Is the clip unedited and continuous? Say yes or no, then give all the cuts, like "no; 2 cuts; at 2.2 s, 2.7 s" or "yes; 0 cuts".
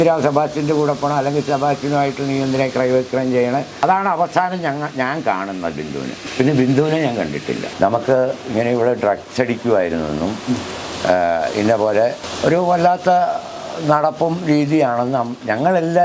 no; 3 cuts; at 3.7 s, 7.7 s, 12.3 s